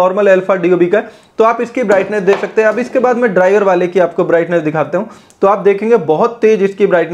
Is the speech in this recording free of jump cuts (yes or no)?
yes